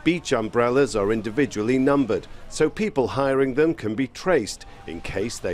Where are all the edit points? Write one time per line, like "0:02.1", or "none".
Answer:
none